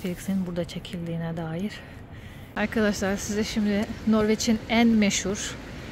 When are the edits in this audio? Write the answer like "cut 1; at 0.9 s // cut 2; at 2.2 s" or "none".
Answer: cut 1; at 2.5 s